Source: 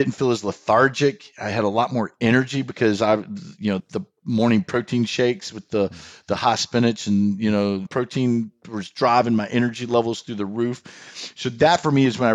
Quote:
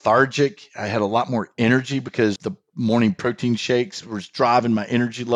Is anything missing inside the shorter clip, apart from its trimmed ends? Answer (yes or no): yes